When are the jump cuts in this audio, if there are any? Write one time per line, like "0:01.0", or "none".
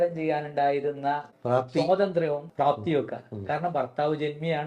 0:01.3
0:02.5